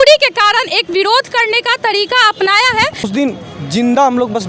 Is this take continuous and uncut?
no; 1 cut; at 3.1 s

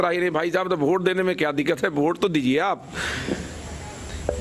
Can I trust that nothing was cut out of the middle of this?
yes; 0 cuts

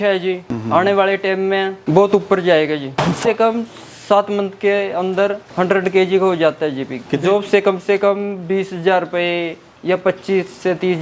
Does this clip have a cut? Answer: yes; 2 cuts; at 3.1 s, 7.1 s

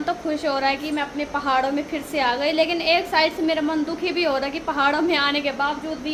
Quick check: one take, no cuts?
yes; 0 cuts

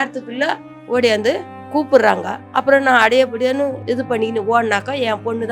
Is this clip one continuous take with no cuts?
no; 1 cut; at 3.8 s

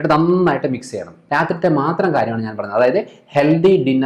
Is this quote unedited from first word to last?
no; 1 cut; at 1.1 s

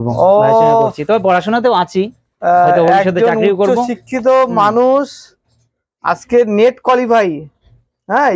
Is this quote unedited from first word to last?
yes; 0 cuts

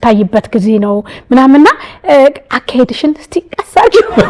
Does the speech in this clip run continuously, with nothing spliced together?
yes; 0 cuts

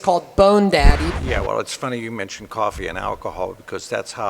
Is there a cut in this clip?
yes; 1 cut; at 1.1 s

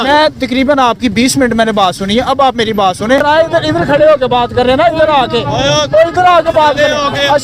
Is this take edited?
yes; 1 cut; at 3.2 s

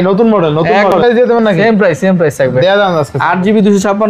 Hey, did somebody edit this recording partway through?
yes; 1 cut; at 1.0 s

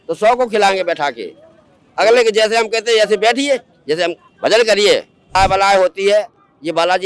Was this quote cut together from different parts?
yes; 1 cut; at 5.3 s

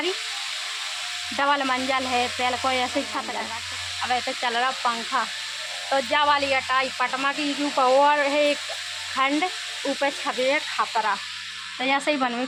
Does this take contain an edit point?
no; 0 cuts

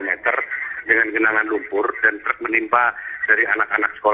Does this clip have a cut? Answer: no; 0 cuts

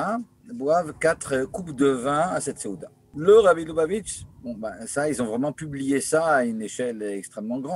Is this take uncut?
no; 1 cut; at 3.1 s

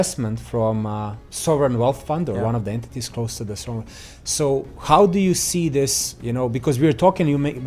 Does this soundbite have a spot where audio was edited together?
yes; 1 cut; at 4.7 s

